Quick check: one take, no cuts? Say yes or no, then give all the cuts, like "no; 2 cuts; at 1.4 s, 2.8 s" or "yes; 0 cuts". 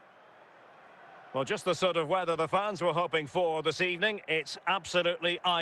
no; 1 cut; at 1.3 s